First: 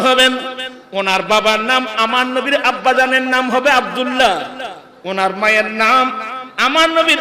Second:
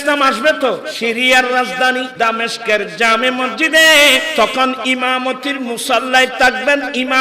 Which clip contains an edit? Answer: second; 3 cuts; at 0.9 s, 2.1 s, 4.3 s

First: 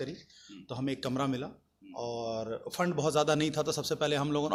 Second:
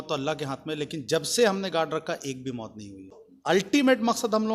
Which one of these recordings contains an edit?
second; 1 cut; at 3.3 s

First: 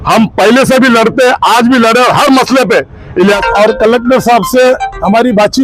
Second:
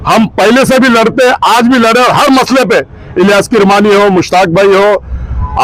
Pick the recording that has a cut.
first; 1 cut; at 3.4 s

